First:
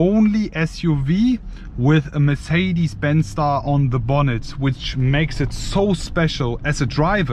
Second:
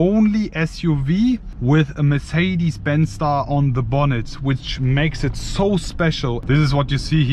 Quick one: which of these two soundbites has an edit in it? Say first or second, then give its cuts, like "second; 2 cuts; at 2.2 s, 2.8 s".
second; 2 cuts; at 1.5 s, 6.4 s